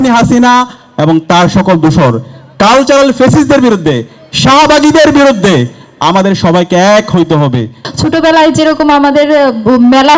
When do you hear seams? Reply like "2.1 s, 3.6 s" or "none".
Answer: 7.8 s